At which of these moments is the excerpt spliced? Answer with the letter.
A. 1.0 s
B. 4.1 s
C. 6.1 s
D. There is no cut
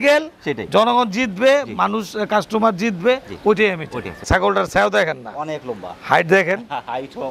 B